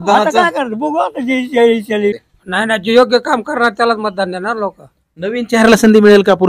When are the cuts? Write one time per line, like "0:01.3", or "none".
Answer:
0:02.2

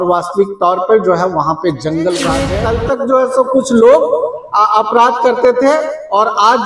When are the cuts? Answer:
0:02.5

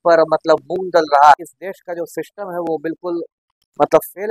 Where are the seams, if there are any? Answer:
0:01.4

